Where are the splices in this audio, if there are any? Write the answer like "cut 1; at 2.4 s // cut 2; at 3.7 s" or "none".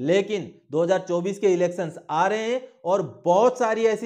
none